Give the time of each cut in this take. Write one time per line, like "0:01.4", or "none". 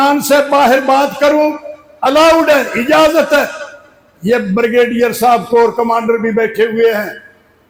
none

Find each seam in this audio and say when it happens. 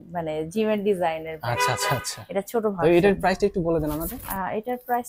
none

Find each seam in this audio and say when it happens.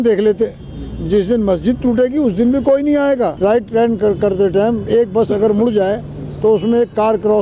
0:03.3

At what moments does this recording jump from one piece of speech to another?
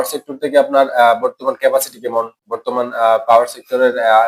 none

